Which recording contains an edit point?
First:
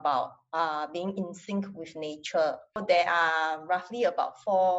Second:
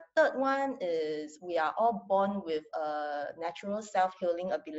first; 1 cut; at 2.8 s

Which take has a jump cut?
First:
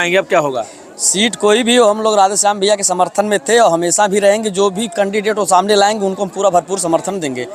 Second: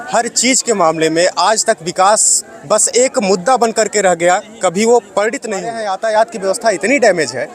second; 1 cut; at 5.9 s

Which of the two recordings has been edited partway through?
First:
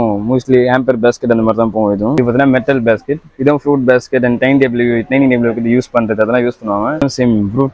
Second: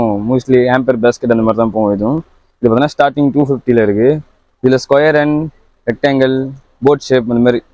first; 2 cuts; at 2.1 s, 6.9 s

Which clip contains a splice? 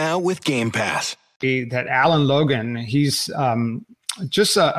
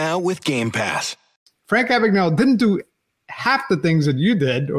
second; 1 cut; at 1.3 s

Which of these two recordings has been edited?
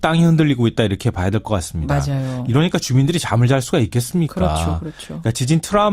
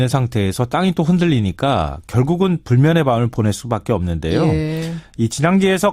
first; 1 cut; at 2.7 s

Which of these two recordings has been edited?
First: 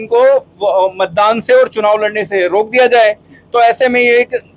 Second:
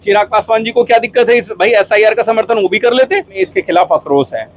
second; 1 cut; at 3.4 s

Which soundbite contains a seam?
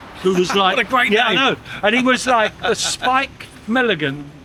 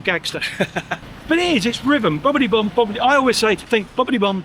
second; 2 cuts; at 1.0 s, 3.6 s

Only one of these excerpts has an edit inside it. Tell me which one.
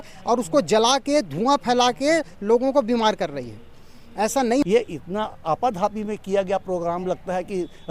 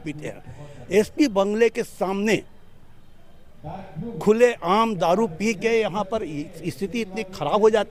first; 1 cut; at 4.6 s

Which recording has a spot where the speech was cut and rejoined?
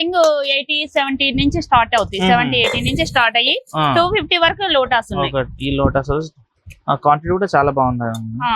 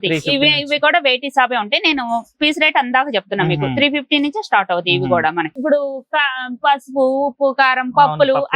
second; 1 cut; at 5.5 s

